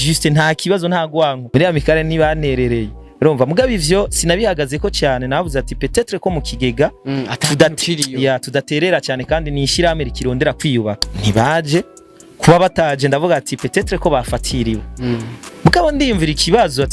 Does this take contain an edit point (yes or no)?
yes